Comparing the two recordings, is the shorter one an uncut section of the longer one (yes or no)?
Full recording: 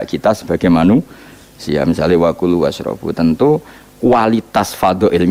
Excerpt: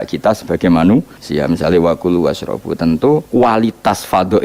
no